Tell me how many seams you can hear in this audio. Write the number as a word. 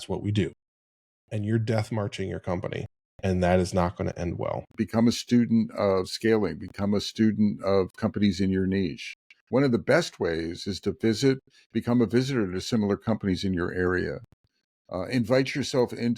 one